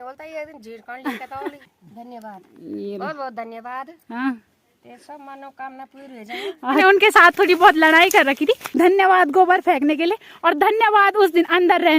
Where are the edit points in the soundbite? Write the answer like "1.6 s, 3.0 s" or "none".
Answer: 1.6 s, 6.8 s, 8.7 s